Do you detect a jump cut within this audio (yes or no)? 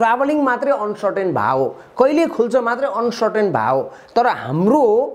no